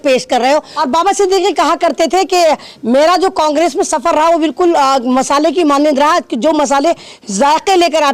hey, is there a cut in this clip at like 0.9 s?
no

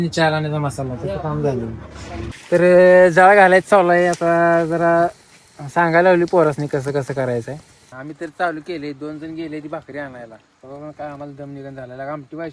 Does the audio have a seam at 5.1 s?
no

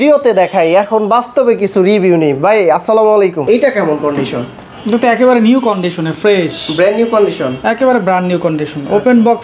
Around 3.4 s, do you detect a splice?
yes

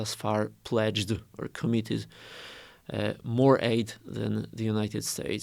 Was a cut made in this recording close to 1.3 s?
no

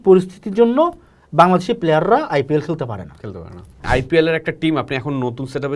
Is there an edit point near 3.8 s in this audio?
yes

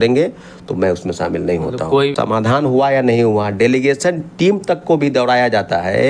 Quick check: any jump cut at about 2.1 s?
yes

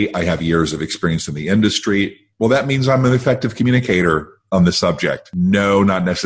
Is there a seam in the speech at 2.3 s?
no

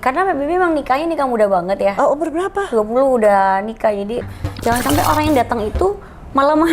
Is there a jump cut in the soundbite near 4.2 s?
yes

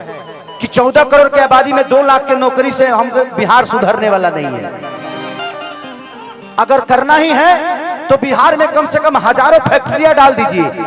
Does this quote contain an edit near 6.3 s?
no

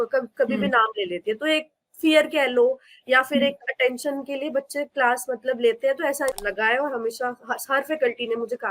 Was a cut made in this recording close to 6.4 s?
yes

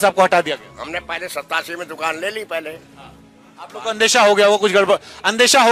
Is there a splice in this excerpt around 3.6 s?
no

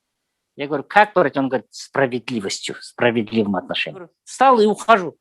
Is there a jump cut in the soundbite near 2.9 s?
no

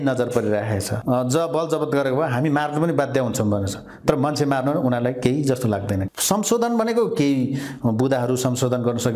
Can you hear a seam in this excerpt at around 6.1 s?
yes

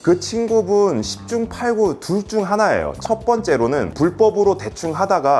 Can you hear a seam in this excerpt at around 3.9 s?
yes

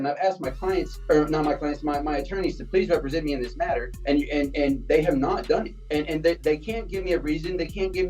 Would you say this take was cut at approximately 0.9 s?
yes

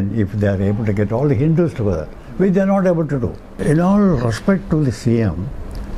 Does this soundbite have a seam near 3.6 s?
yes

